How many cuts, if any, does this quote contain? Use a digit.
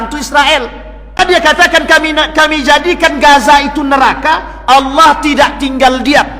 1